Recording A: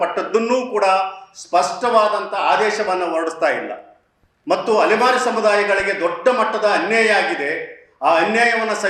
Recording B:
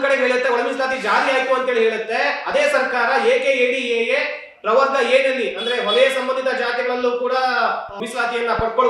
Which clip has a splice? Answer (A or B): B